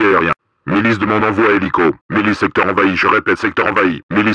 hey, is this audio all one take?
yes; 0 cuts

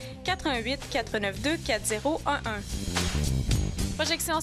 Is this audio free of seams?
yes; 0 cuts

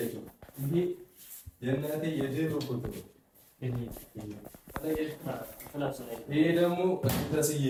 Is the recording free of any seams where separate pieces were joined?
yes; 0 cuts

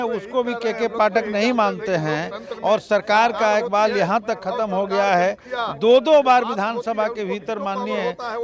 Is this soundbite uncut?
yes; 0 cuts

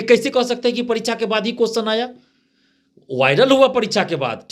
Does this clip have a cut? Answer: no; 0 cuts

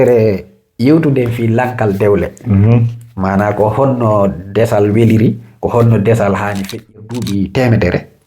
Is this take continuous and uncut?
no; 1 cut; at 7.0 s

